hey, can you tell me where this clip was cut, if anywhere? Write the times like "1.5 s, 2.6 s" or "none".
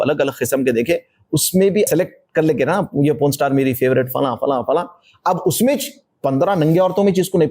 1.9 s